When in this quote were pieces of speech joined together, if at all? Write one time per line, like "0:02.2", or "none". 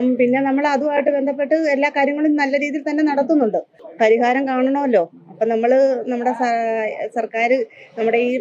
0:03.8